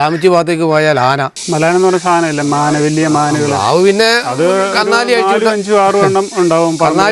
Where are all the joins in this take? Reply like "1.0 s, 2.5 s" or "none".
1.4 s